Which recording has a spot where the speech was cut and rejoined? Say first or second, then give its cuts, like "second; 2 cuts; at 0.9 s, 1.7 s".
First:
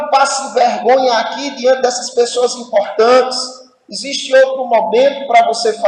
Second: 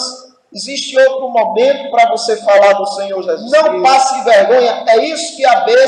second; 1 cut; at 3.4 s